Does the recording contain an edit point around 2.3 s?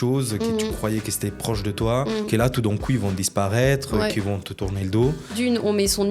yes; 2 cuts; at 2.3 s, 5.3 s

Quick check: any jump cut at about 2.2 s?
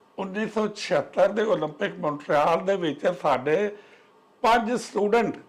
no; 0 cuts

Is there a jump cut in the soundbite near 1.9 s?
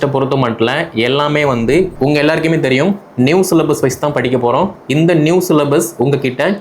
yes; 1 cut; at 1.9 s

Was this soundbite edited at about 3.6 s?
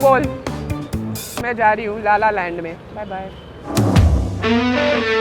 yes; 1 cut; at 3.6 s

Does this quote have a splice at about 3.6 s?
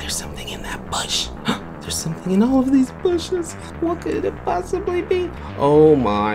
yes; 2 cuts; at 1.9 s, 3.6 s

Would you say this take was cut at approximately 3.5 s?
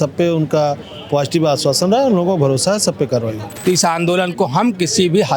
yes; 1 cut; at 3.5 s

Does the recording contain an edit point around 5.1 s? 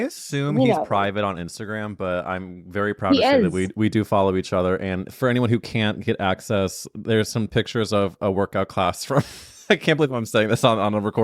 yes; 1 cut; at 5.1 s

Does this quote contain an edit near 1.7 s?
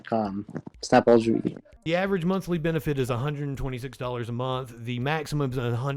yes; 1 cut; at 1.7 s

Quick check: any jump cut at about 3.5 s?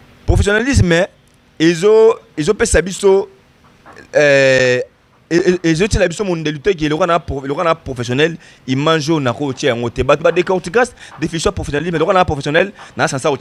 no; 0 cuts

